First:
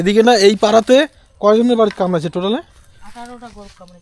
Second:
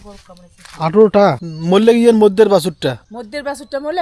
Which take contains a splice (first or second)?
second